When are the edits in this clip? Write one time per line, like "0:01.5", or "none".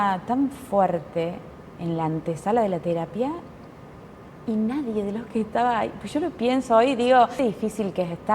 0:07.3